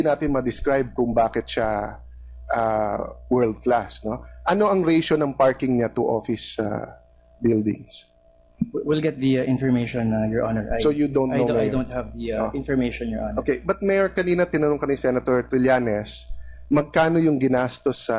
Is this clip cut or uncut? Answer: uncut